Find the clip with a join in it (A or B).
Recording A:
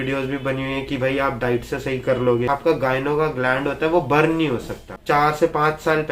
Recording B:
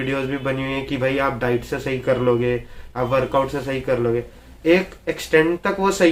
A